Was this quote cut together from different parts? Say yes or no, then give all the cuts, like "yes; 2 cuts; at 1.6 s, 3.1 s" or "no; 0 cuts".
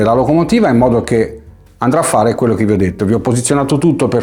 no; 0 cuts